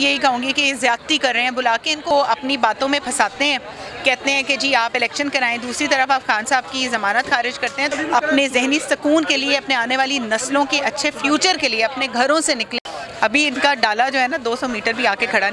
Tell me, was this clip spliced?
yes; 3 cuts; at 2.1 s, 7.9 s, 12.8 s

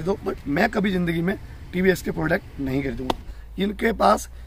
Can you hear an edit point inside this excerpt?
yes; 1 cut; at 3.3 s

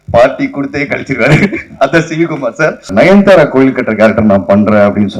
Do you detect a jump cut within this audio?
yes; 1 cut; at 2.9 s

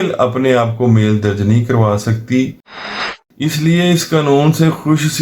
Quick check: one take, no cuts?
no; 1 cut; at 2.8 s

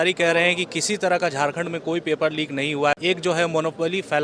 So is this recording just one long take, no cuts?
no; 1 cut; at 2.9 s

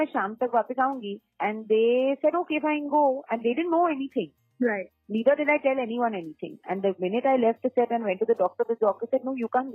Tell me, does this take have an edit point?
no; 0 cuts

